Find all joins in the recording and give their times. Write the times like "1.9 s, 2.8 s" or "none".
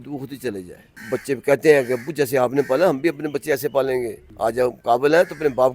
1.0 s, 4.2 s